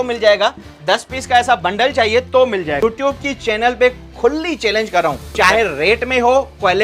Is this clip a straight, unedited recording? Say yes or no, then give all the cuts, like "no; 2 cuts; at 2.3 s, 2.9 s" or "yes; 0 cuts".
no; 2 cuts; at 2.8 s, 5.3 s